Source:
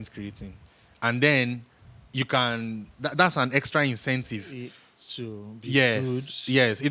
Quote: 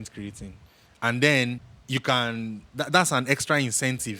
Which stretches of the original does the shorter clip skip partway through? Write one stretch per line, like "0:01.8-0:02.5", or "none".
0:01.7-0:02.0